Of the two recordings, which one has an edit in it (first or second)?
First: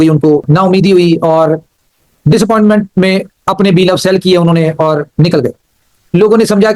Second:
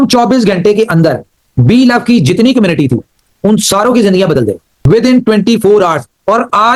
first